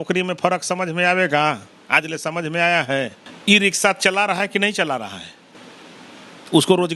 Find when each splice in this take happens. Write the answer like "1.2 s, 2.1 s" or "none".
3.2 s

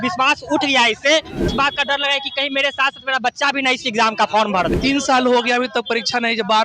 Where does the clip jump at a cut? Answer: 1.5 s, 4.7 s

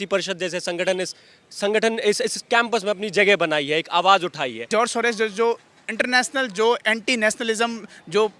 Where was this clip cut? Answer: 4.7 s

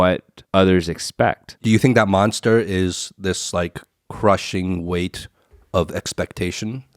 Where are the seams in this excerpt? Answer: 1.5 s

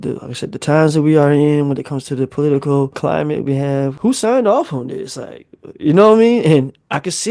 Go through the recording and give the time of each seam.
2.9 s, 3.9 s

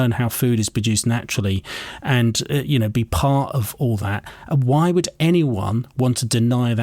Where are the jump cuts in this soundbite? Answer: none

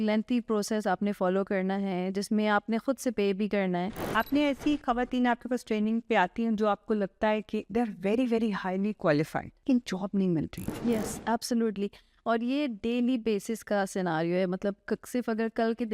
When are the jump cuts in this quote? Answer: 4.0 s, 9.5 s, 10.6 s

